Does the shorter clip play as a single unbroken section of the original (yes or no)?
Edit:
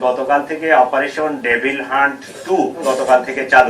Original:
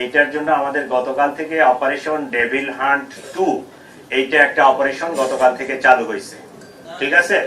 no